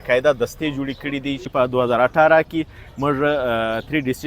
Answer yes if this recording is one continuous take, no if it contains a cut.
no